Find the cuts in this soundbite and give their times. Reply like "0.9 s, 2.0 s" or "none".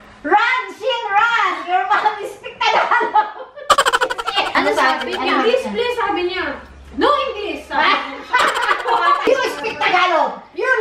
4.5 s, 9.3 s